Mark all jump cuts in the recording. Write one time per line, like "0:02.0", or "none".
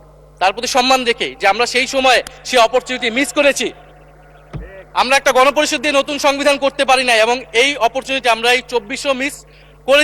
none